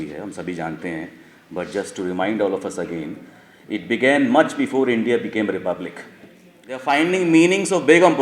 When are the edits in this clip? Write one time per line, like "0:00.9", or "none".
0:06.8